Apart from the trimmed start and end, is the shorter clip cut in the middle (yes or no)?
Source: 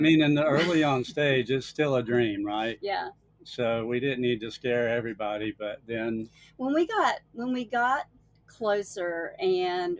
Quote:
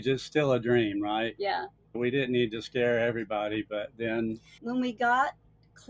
yes